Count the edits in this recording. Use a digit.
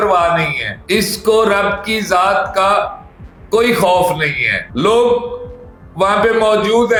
0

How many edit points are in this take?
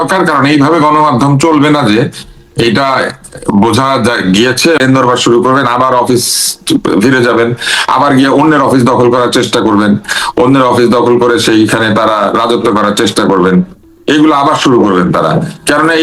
1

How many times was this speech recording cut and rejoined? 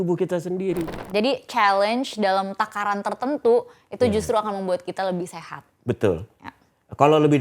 1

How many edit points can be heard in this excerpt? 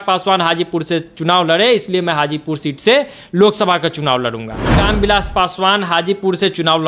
1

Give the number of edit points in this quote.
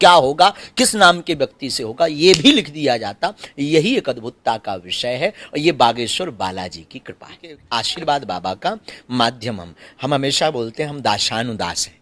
1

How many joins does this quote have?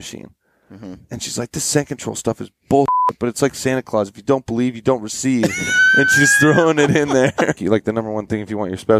1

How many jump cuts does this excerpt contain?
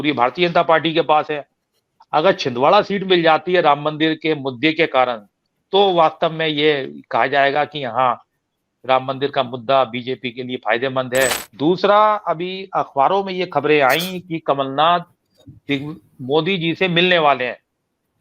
1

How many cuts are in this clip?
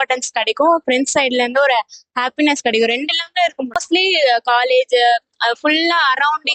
0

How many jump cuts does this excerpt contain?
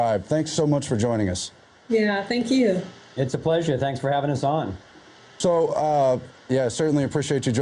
1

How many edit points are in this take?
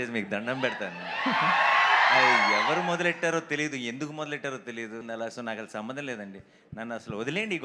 1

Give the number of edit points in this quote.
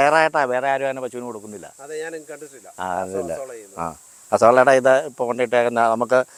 0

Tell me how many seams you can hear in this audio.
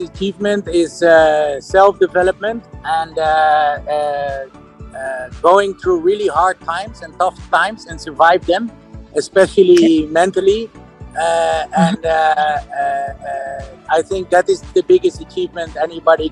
0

